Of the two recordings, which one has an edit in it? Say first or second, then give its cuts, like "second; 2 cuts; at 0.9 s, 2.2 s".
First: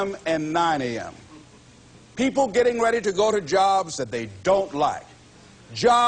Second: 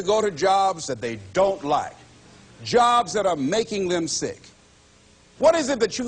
second; 1 cut; at 4.8 s